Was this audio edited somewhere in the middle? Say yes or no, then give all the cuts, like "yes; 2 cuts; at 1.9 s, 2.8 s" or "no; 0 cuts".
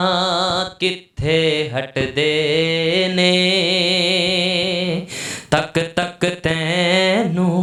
no; 0 cuts